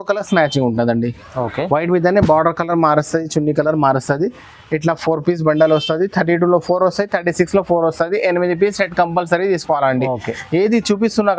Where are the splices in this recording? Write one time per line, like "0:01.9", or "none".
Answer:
none